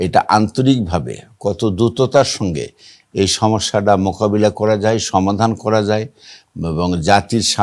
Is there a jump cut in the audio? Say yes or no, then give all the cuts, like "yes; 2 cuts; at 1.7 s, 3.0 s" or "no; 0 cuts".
no; 0 cuts